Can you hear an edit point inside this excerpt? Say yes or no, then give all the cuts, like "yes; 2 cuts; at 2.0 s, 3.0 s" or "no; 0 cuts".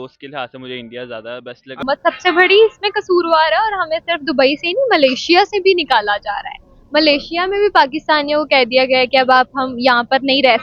yes; 1 cut; at 1.8 s